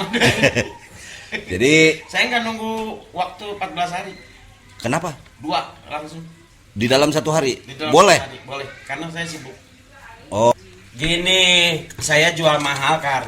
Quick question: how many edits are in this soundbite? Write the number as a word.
one